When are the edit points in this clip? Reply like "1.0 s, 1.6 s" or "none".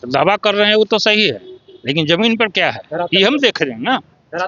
none